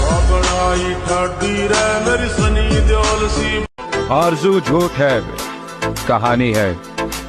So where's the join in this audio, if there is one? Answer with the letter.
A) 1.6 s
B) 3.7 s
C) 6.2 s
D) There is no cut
B